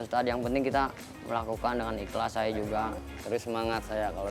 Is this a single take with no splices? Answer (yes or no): no